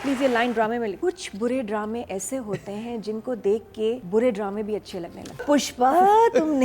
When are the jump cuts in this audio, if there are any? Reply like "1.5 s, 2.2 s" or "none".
1.0 s, 4.0 s, 5.4 s